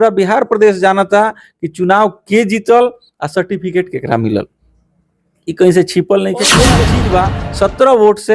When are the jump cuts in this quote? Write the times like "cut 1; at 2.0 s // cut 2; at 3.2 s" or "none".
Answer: cut 1; at 6.7 s

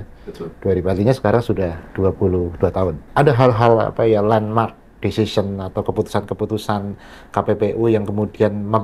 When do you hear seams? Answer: cut 1; at 1.8 s // cut 2; at 3.0 s

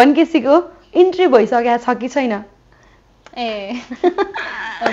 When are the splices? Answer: none

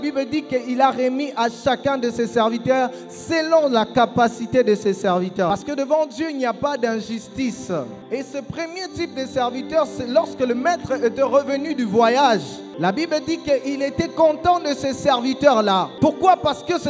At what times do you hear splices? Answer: cut 1; at 5.5 s // cut 2; at 8.0 s // cut 3; at 12.7 s // cut 4; at 15.9 s

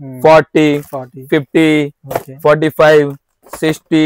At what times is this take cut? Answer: none

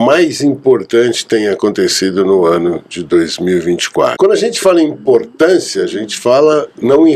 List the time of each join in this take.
cut 1; at 4.1 s

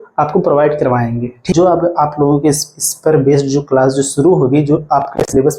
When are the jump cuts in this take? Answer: cut 1; at 1.5 s

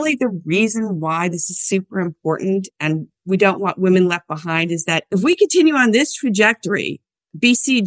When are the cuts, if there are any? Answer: none

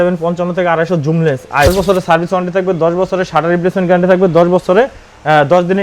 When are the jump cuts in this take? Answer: cut 1; at 1.7 s

